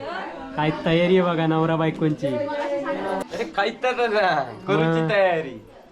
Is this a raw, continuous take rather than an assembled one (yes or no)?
no